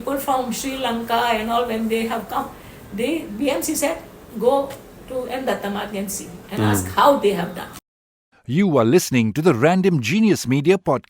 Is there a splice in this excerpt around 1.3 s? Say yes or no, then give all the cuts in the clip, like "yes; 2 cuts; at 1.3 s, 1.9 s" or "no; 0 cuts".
no; 1 cut; at 8.0 s